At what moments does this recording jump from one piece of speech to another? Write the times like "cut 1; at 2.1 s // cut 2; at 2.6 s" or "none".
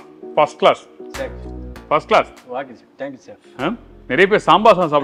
none